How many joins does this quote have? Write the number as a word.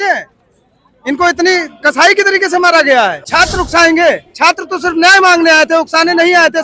one